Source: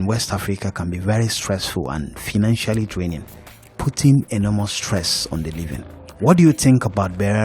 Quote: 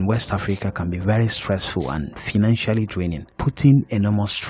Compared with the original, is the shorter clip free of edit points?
no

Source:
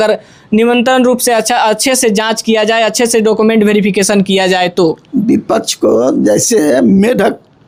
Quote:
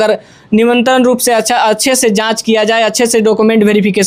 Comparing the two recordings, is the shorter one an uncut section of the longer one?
yes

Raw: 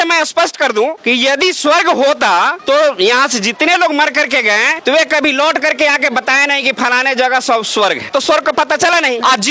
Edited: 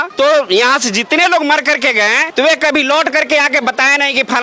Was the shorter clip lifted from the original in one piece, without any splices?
yes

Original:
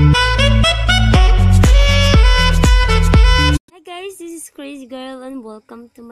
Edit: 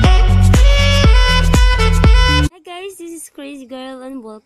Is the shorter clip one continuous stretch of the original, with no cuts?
no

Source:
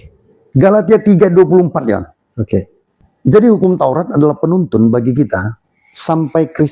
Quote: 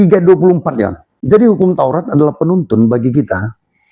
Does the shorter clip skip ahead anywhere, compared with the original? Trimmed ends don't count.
yes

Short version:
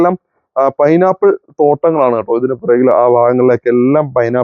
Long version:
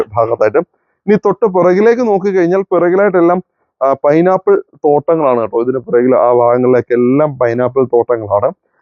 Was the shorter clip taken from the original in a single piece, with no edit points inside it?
yes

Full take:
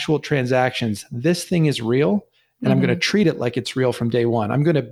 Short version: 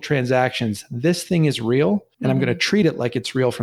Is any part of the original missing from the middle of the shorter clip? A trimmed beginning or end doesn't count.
yes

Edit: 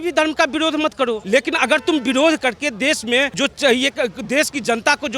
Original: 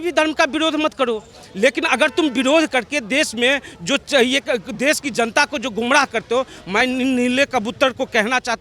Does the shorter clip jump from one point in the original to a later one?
yes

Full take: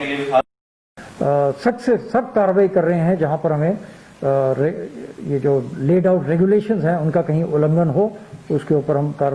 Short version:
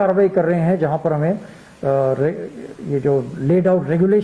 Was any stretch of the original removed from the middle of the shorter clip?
no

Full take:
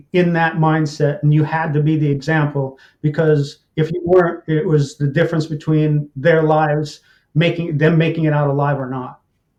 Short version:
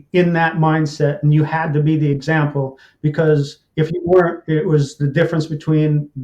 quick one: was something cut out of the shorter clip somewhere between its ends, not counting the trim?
no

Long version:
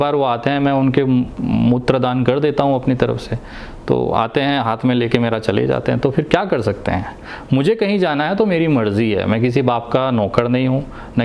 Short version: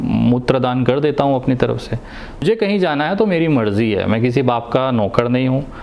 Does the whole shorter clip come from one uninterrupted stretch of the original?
no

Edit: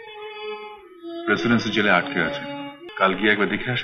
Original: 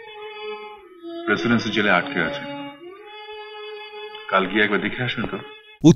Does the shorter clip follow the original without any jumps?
no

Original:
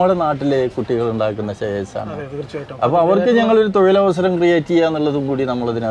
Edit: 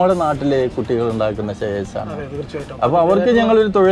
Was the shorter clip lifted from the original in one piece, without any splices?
yes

